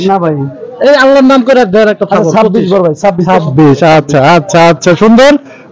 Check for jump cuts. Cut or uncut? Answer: uncut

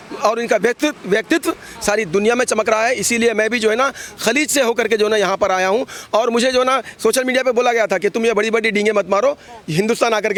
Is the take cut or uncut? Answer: uncut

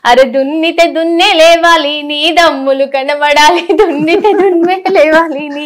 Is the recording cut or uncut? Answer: uncut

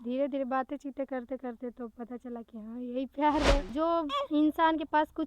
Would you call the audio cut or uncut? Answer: cut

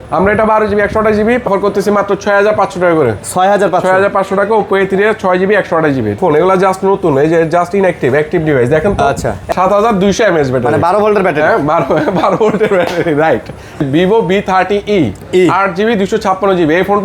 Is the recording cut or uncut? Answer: cut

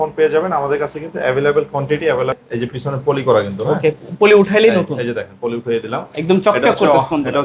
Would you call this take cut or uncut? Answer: cut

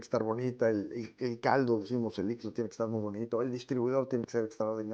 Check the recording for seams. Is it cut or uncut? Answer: uncut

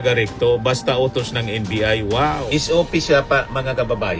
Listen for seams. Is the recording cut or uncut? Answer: cut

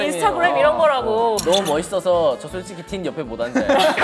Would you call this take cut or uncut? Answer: cut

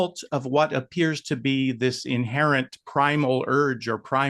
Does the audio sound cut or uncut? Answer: uncut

